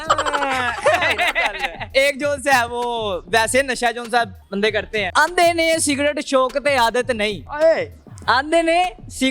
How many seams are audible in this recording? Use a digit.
2